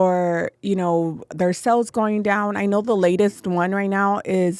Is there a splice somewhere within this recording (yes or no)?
no